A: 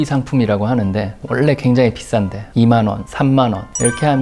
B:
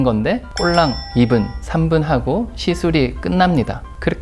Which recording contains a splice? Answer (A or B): B